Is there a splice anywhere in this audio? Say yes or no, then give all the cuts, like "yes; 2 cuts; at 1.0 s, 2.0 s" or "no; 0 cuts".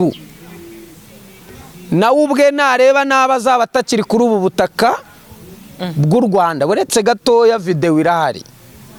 no; 0 cuts